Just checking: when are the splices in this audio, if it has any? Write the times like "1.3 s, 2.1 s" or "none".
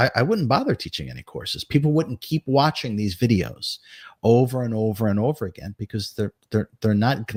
none